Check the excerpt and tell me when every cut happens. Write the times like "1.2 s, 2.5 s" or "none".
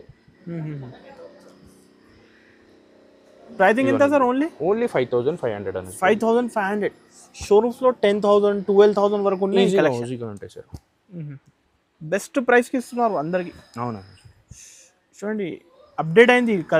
none